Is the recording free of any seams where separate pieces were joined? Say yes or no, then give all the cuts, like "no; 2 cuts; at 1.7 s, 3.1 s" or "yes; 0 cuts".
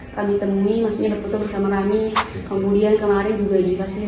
yes; 0 cuts